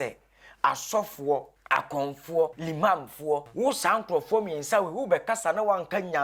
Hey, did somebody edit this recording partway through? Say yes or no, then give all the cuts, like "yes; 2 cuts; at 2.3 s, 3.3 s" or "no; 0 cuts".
yes; 3 cuts; at 1.5 s, 2.6 s, 3.5 s